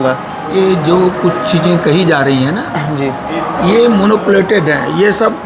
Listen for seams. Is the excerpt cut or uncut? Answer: uncut